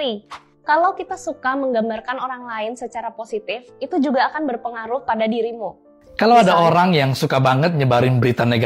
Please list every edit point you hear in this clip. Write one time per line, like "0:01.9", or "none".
0:06.2